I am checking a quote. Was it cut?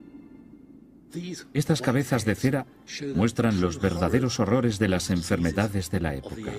yes; 1 cut; at 4.2 s

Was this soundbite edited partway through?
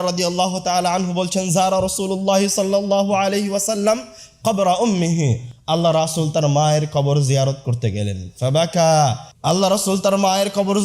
yes; 1 cut; at 9.3 s

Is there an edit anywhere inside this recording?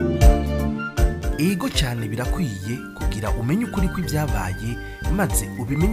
no; 0 cuts

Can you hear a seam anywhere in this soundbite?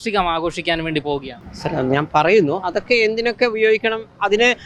no; 0 cuts

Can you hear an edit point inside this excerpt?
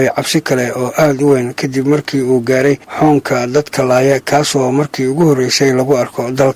no; 0 cuts

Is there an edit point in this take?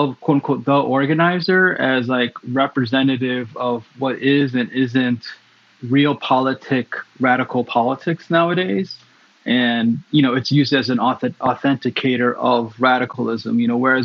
no; 0 cuts

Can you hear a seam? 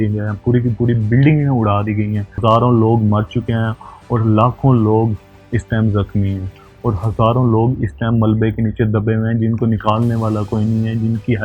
no; 0 cuts

